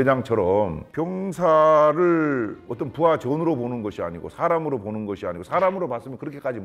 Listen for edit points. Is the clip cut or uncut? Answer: uncut